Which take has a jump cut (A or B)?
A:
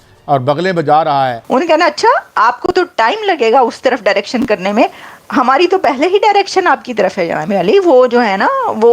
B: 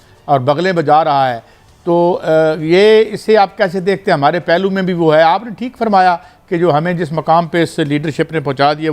A